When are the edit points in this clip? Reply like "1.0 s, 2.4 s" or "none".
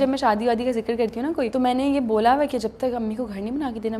1.5 s